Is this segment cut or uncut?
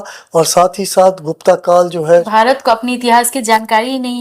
cut